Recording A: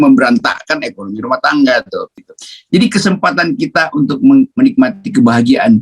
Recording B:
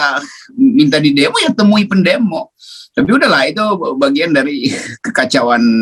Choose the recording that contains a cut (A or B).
A